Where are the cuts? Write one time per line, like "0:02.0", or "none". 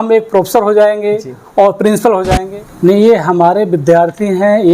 0:02.4

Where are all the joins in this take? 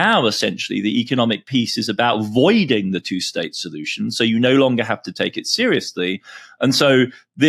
none

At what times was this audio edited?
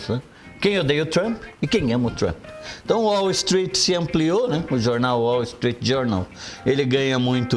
none

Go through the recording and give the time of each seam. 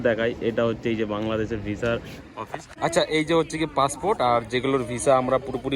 0:02.7

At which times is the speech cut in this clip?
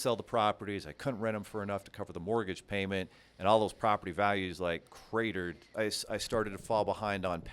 0:05.7

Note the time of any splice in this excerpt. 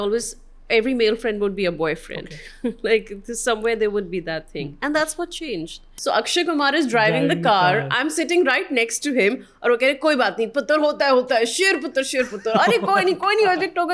0:05.9

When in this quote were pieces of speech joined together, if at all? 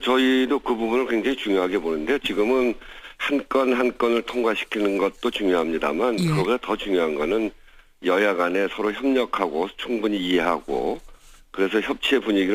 0:02.9

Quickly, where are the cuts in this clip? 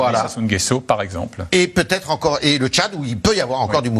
none

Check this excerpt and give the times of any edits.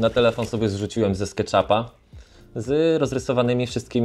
none

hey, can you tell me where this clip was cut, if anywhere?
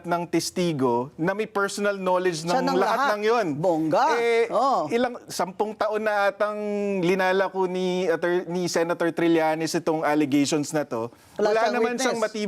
none

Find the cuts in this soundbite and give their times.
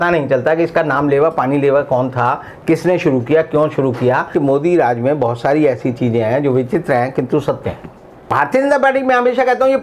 0:04.3
0:08.2

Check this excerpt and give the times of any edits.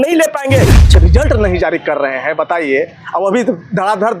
0:00.9

